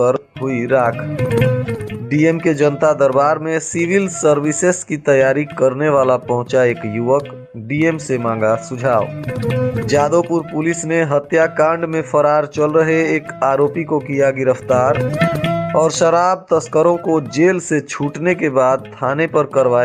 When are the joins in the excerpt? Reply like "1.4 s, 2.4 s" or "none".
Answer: none